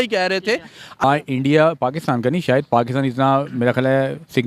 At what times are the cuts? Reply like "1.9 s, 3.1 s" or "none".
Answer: 1.0 s